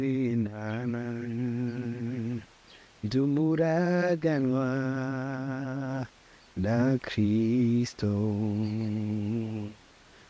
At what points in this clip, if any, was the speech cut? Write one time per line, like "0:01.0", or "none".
none